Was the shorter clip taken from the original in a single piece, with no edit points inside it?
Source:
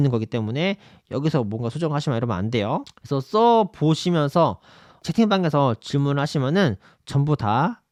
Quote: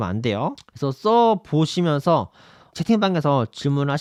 yes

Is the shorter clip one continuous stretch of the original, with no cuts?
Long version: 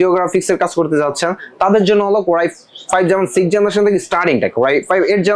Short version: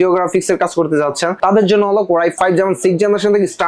no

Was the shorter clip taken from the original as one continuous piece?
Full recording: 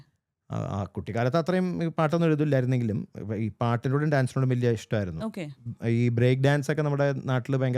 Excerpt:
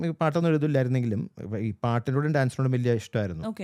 yes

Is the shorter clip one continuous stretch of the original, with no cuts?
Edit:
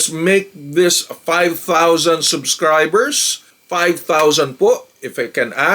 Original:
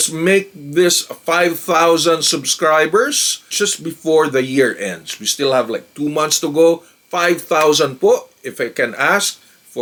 no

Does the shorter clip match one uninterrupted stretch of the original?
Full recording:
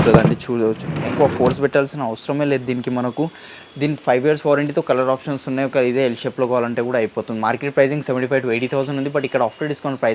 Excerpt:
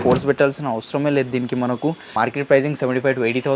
no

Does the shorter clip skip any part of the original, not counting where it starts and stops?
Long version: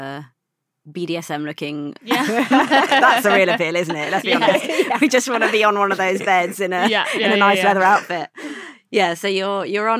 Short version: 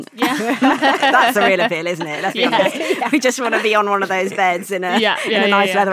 no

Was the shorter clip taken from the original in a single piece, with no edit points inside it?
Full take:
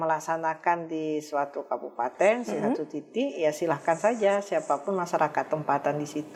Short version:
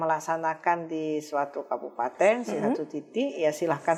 yes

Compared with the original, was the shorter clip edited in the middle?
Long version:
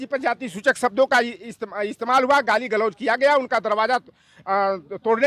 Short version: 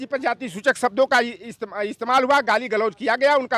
no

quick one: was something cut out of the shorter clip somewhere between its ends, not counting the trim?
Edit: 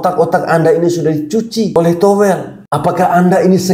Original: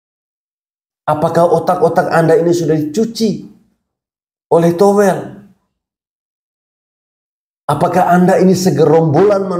yes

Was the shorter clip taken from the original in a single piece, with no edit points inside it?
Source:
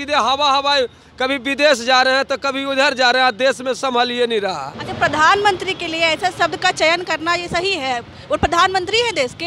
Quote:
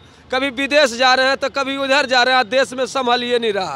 yes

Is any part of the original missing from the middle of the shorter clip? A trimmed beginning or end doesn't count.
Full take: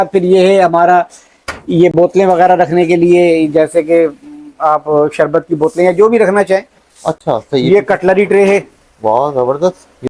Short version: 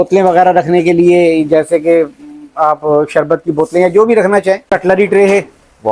yes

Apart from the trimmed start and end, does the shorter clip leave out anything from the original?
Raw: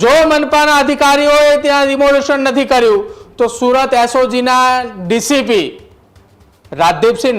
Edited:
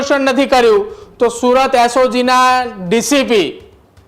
no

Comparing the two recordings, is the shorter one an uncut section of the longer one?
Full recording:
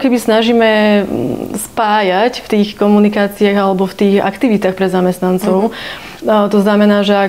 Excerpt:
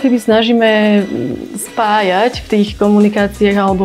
yes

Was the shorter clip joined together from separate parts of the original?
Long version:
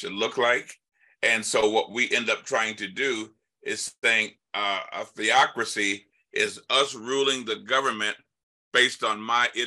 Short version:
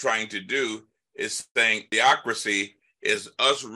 yes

